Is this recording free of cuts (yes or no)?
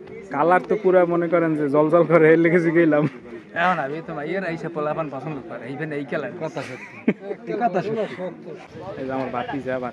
no